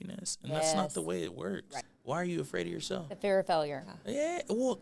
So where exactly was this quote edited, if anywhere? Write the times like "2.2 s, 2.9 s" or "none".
1.7 s